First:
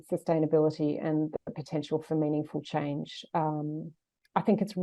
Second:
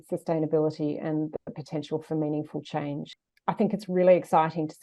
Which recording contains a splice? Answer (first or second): second